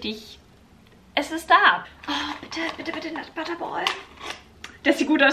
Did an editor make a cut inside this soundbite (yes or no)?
yes